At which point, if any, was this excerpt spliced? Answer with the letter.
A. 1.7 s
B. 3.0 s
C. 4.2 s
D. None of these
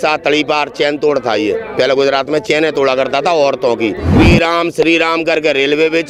C